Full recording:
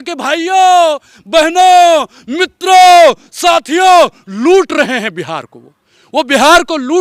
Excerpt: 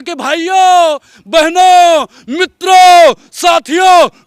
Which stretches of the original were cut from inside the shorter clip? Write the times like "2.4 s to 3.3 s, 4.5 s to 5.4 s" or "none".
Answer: none